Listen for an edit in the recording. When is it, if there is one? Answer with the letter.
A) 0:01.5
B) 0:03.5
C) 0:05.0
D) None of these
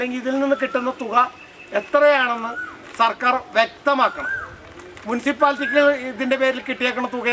D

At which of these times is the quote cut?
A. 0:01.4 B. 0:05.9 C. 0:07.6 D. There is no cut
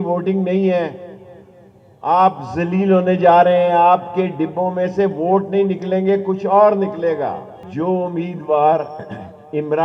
C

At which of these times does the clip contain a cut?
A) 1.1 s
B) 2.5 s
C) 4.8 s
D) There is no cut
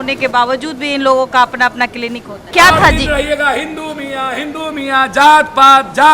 B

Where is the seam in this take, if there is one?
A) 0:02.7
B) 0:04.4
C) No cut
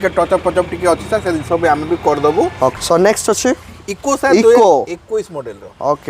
A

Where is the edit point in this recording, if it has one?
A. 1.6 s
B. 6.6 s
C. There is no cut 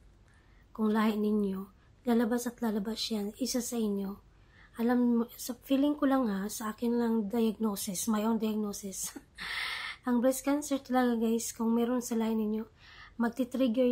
C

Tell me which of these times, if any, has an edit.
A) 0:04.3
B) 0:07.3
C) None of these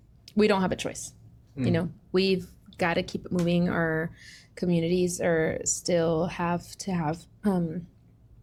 C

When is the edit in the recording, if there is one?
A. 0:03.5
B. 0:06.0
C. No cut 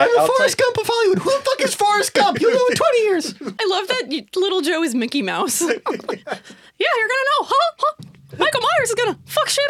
A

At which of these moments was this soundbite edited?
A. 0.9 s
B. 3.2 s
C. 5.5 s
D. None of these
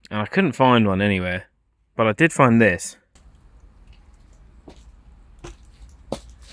B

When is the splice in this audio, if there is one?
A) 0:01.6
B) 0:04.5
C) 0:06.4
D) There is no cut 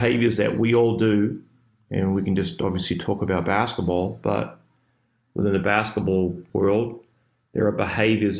C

